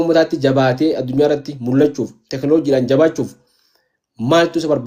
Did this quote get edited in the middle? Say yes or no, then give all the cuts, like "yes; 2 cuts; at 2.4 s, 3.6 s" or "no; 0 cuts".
no; 0 cuts